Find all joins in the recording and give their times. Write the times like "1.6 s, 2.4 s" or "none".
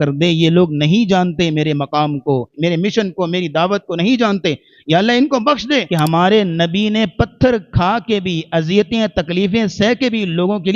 2.5 s, 5.9 s